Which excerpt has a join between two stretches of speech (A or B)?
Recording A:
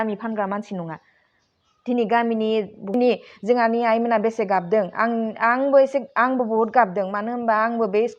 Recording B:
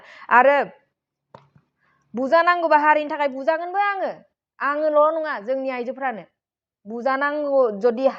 A